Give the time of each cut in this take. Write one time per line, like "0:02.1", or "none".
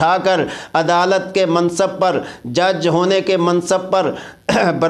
none

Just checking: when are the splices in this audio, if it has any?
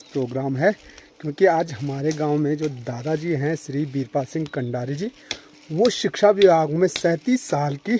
none

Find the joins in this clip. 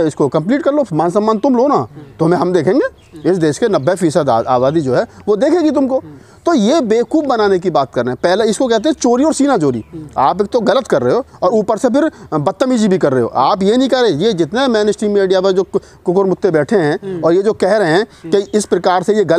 none

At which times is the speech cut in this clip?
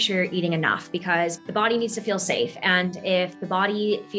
0:01.4

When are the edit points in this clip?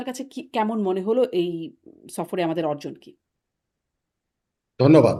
none

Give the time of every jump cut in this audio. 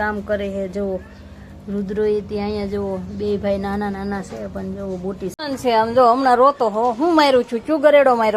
0:05.3

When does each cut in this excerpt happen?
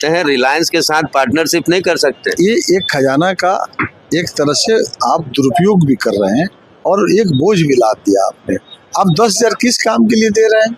none

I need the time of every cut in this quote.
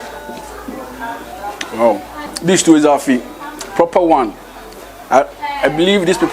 0:02.2

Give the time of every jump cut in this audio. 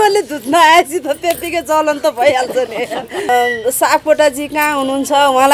0:03.2

